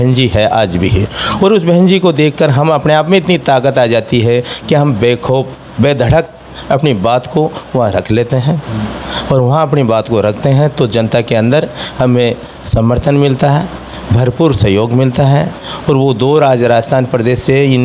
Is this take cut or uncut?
uncut